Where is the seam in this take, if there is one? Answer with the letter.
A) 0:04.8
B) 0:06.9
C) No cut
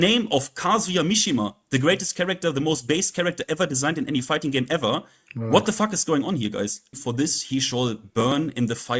B